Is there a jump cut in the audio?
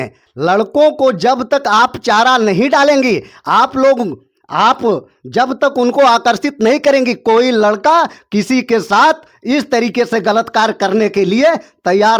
no; 0 cuts

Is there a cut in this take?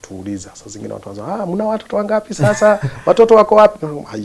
no; 0 cuts

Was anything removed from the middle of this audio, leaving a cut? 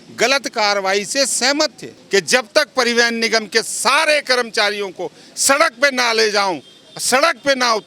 yes; 1 cut; at 1.9 s

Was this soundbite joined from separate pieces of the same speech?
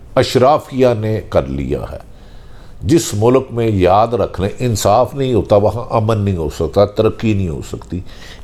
no; 0 cuts

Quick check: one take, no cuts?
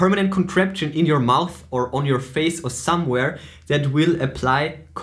yes; 0 cuts

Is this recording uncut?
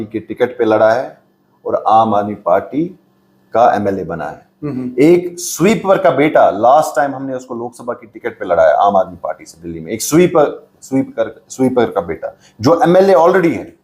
yes; 0 cuts

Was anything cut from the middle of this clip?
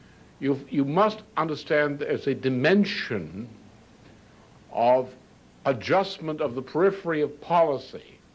yes; 1 cut; at 1.8 s

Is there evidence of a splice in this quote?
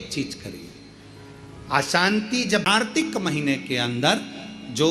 yes; 1 cut; at 2.8 s

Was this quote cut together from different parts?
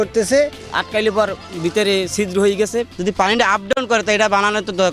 no; 0 cuts

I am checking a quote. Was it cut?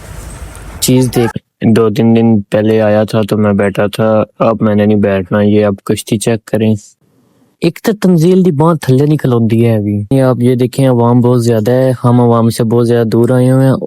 yes; 2 cuts; at 1.3 s, 10.1 s

